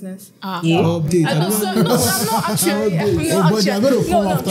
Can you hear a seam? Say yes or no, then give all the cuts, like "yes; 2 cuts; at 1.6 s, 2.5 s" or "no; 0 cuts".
no; 0 cuts